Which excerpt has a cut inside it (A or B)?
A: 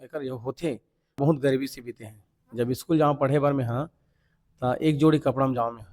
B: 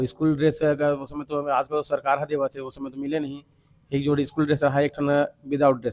A